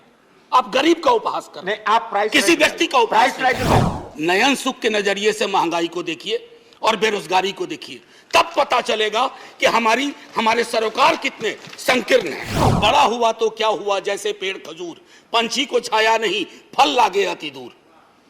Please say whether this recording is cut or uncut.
cut